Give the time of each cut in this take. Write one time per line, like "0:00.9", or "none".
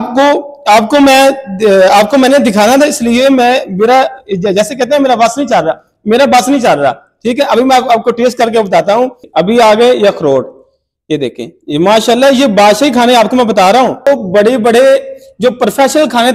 0:09.2
0:14.0